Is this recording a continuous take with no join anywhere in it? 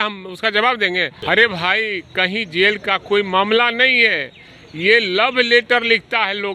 no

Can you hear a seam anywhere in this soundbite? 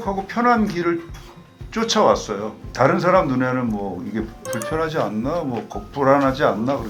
no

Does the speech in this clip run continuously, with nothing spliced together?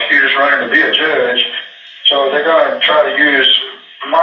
yes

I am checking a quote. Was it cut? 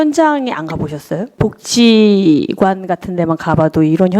yes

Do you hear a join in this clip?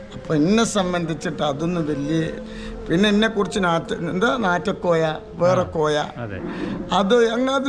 yes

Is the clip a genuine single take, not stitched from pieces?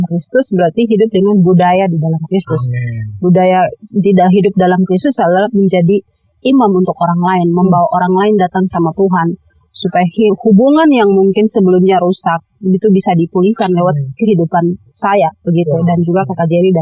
yes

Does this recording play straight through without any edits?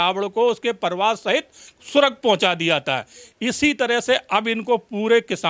yes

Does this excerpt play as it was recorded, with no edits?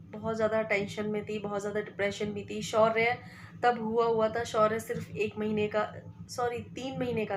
yes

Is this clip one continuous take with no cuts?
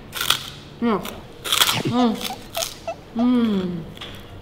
no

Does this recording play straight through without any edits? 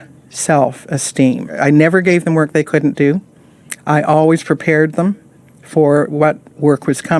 no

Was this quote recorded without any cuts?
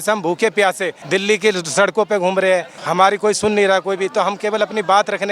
no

